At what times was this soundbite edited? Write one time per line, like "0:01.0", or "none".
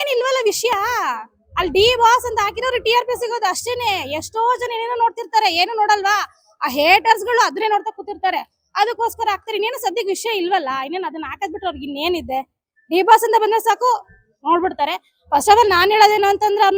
none